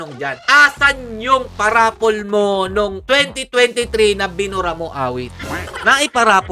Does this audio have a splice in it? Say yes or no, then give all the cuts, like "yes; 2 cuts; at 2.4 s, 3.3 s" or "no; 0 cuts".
yes; 1 cut; at 5.4 s